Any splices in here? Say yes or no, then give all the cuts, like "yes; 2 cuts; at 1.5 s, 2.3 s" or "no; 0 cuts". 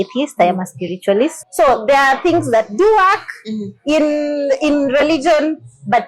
yes; 1 cut; at 1.4 s